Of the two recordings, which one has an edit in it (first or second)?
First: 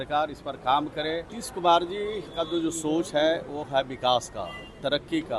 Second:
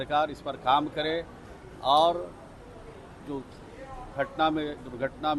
first